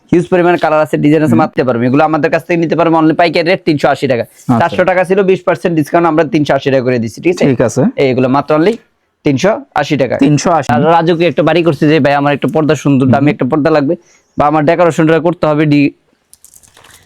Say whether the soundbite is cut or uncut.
cut